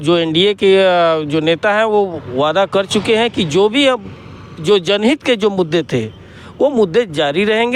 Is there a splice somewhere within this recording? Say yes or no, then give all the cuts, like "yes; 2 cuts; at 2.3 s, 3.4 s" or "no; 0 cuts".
no; 0 cuts